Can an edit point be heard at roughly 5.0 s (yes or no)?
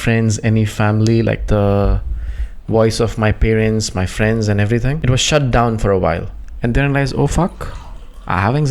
yes